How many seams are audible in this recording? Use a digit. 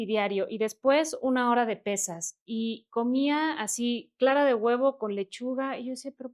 0